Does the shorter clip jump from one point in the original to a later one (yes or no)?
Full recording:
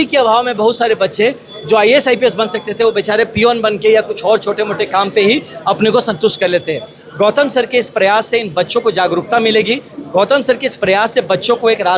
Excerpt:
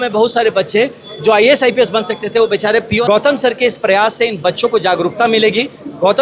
yes